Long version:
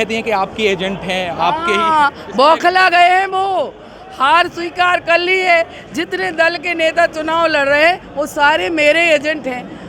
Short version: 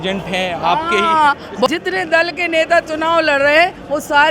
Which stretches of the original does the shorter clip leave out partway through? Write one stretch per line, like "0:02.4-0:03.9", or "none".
0:02.4-0:05.9